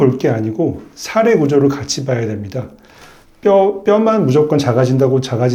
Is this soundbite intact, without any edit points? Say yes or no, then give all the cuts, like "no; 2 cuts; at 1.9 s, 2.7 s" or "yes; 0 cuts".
yes; 0 cuts